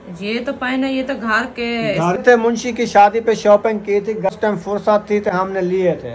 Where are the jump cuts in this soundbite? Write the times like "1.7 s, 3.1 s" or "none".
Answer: 2.2 s, 4.3 s